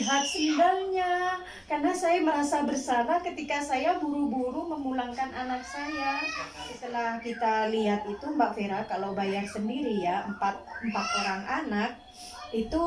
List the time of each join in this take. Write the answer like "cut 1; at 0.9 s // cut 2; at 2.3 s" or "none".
cut 1; at 6.8 s